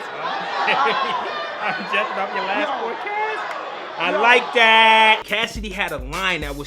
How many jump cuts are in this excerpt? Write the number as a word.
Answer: one